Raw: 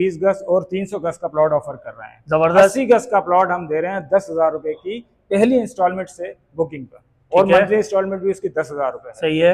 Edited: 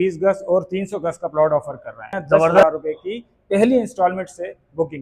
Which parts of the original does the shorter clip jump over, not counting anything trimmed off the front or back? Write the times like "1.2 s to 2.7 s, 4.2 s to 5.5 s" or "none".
2.6 s to 4.4 s